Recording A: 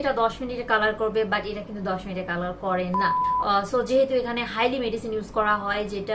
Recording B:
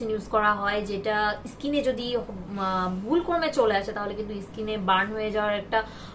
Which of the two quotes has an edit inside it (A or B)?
A